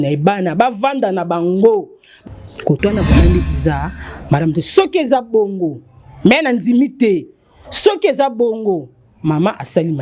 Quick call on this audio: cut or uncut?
cut